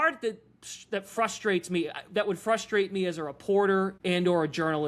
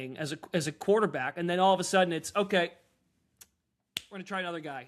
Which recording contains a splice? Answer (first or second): first